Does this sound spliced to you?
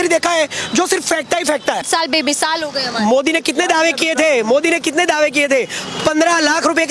yes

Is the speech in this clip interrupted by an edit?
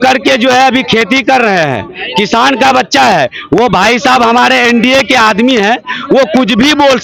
no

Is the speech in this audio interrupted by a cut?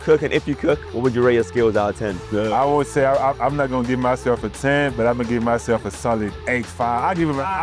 yes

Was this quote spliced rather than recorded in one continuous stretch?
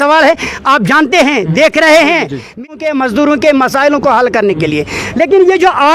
yes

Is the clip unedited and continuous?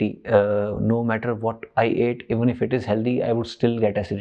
yes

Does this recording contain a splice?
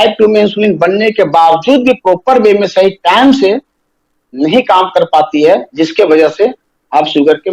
no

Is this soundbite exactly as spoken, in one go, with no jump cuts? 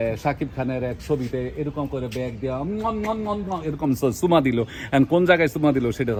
yes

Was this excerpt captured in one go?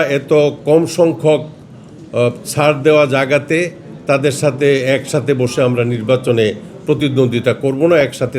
yes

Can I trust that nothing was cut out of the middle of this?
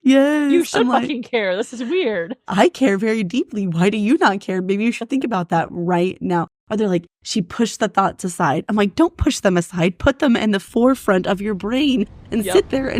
yes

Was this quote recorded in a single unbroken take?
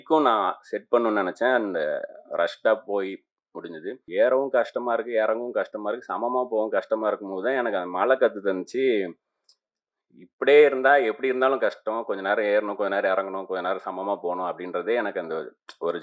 no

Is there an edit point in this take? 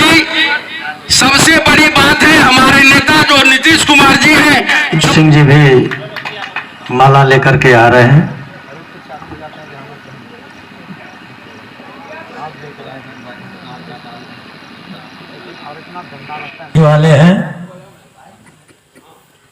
yes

